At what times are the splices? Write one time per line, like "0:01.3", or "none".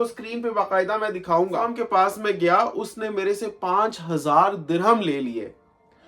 0:01.8